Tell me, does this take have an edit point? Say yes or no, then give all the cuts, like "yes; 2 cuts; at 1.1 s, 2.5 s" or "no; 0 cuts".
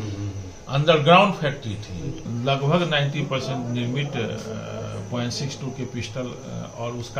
yes; 1 cut; at 2.2 s